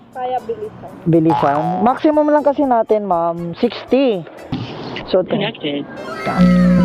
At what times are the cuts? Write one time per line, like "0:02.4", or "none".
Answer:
0:04.5